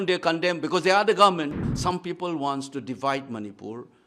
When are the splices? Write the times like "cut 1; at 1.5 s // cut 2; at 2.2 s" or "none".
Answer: cut 1; at 1.7 s